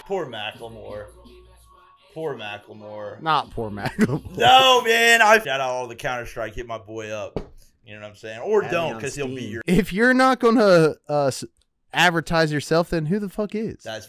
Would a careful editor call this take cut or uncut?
cut